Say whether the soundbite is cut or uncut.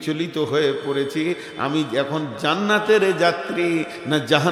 uncut